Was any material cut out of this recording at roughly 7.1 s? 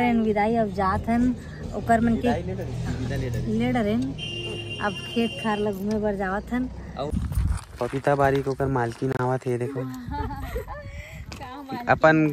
yes; 1 cut; at 7.1 s

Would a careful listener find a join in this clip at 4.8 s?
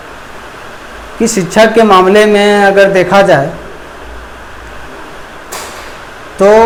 no; 0 cuts

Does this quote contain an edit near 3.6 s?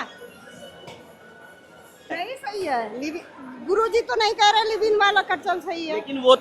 no; 1 cut; at 2.1 s

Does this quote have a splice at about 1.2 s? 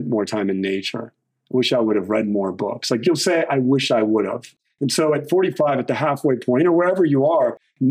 no; 1 cut; at 4.5 s

